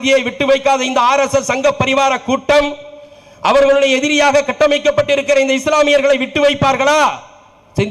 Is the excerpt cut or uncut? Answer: uncut